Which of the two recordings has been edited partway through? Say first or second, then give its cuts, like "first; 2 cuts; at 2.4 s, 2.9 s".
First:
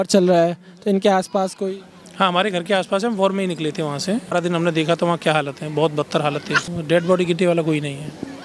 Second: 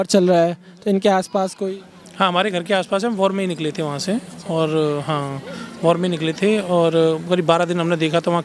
first; 2 cuts; at 4.3 s, 6.6 s